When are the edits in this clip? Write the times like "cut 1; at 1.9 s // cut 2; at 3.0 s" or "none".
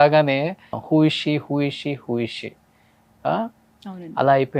none